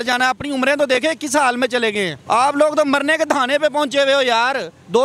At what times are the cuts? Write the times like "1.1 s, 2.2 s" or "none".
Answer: 2.2 s

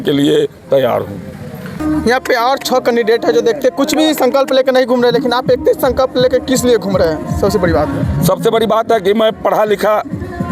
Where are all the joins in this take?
1.8 s

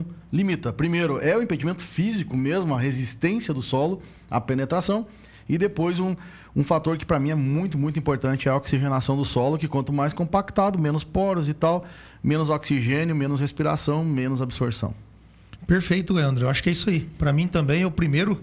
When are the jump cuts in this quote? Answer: none

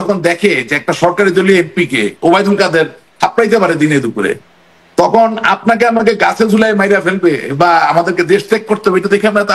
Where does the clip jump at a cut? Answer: none

